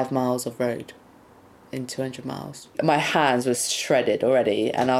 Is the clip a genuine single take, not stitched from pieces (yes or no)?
no